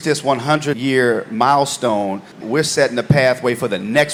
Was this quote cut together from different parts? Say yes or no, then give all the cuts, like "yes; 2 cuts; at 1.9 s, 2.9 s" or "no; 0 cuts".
no; 0 cuts